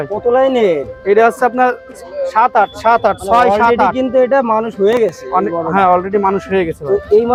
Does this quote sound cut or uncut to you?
uncut